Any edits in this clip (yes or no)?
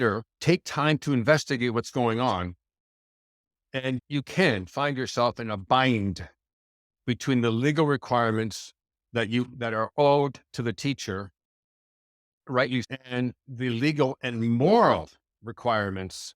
yes